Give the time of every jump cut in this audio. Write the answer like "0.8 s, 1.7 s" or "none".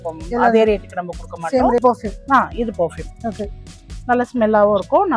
1.8 s